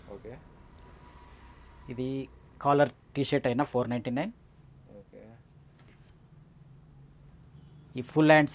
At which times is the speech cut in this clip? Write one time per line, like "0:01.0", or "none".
none